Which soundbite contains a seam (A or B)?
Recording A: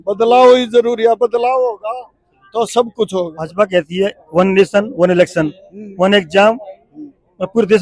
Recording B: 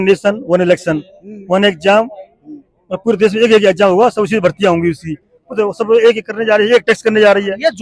A